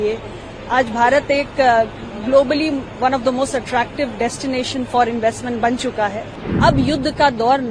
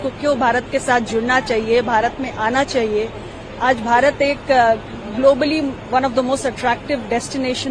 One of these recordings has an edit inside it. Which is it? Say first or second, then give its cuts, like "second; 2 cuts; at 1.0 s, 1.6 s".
first; 1 cut; at 6.4 s